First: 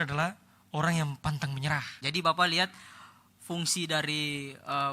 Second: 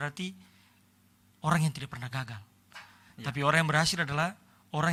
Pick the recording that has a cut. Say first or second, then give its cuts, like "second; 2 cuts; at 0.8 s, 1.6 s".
first; 1 cut; at 2.0 s